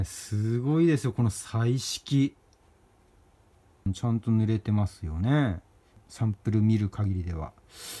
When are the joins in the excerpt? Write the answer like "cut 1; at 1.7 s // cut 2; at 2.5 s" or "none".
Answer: cut 1; at 3.9 s // cut 2; at 6.1 s